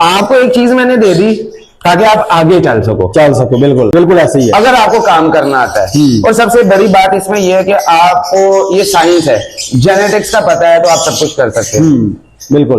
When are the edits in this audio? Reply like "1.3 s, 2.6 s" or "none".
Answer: 3.9 s